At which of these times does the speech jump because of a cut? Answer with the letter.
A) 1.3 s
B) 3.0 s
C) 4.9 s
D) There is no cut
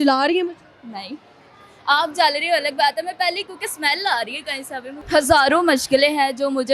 C